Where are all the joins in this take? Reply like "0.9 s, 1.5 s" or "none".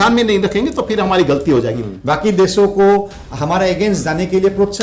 1.8 s